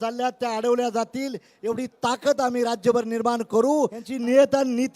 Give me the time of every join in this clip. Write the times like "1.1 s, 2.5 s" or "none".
4.1 s